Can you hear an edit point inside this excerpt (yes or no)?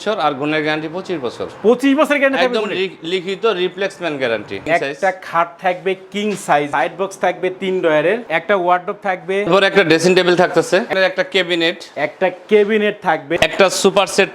yes